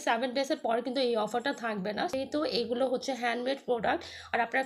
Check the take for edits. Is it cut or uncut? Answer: cut